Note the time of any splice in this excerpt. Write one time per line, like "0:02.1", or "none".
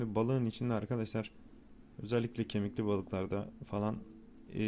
none